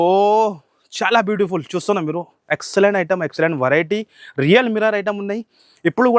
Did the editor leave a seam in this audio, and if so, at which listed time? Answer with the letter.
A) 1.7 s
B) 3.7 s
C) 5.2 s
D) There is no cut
D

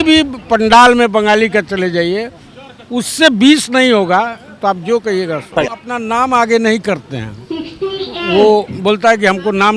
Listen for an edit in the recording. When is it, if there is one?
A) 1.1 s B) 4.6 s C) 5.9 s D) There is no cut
C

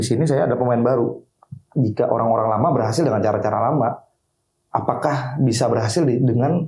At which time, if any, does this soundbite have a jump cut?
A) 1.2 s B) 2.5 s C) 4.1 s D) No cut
A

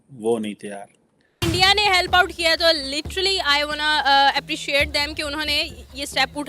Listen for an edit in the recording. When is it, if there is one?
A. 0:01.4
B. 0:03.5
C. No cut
A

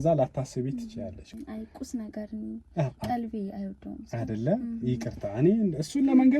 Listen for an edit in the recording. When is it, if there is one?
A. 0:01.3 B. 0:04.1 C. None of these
A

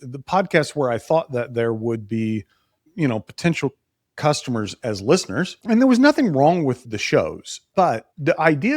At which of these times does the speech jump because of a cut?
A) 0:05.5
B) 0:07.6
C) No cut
B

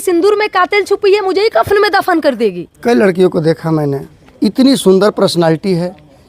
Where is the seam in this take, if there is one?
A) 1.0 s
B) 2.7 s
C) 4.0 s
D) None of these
B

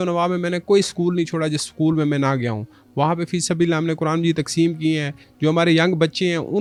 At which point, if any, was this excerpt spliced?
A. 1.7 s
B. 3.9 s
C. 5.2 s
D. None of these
D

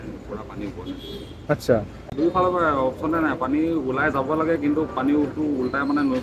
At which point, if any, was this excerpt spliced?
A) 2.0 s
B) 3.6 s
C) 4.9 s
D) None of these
A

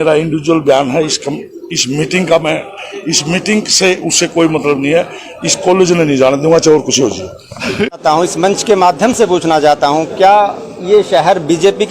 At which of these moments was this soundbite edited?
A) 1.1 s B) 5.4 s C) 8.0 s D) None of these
C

